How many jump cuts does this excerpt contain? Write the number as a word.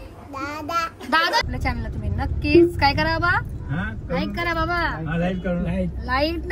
one